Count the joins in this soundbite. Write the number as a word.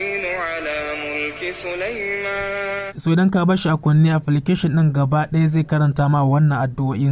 one